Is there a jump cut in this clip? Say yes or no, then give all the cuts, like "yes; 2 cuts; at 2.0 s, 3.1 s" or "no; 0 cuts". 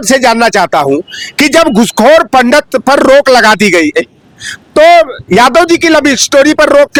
no; 0 cuts